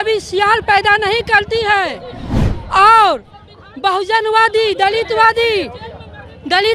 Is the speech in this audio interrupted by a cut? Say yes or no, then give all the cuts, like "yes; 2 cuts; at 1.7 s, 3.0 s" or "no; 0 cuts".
no; 0 cuts